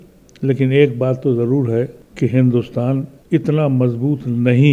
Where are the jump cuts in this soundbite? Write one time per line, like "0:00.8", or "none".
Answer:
0:02.0
0:03.2